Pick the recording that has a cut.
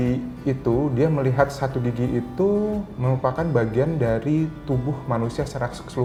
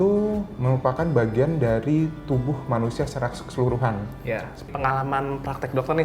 second; 1 cut; at 4.7 s

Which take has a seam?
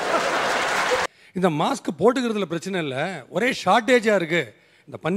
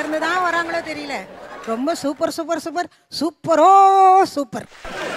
first; 1 cut; at 1.1 s

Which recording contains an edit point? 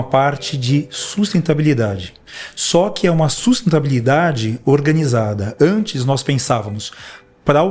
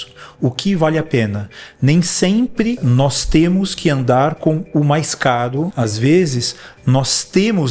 second; 2 cuts; at 2.8 s, 5.7 s

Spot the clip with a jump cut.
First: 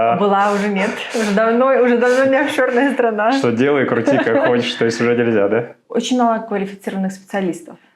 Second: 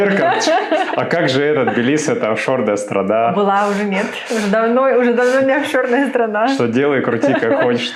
first; 1 cut; at 5.8 s

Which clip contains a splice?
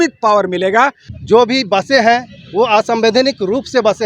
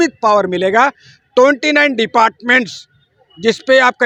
first; 1 cut; at 1.1 s

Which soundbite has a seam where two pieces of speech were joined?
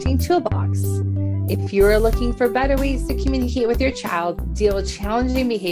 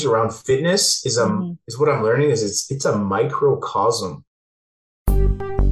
second; 1 cut; at 4.6 s

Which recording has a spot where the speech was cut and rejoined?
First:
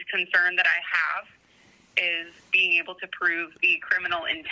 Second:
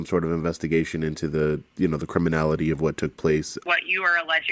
second; 1 cut; at 3.5 s

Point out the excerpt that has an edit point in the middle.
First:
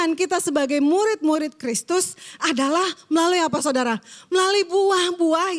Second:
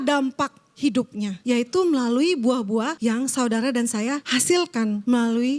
second; 3 cuts; at 1.4 s, 2.9 s, 4.6 s

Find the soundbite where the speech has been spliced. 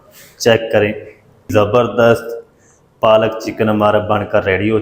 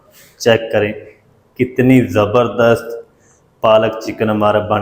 first; 1 cut; at 1.5 s

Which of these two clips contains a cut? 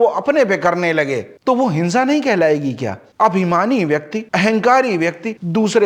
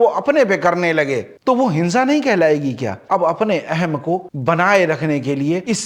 second; 1 cut; at 2.9 s

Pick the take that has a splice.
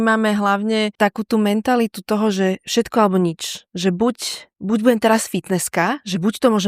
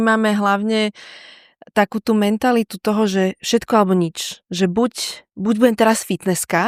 first; 1 cut; at 0.9 s

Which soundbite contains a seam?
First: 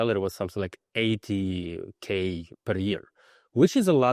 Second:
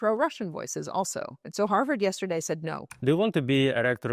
second; 2 cuts; at 1.5 s, 2.8 s

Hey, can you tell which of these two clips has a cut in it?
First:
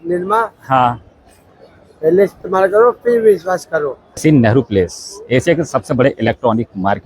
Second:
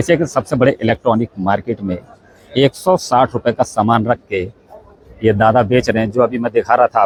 first; 1 cut; at 4.0 s

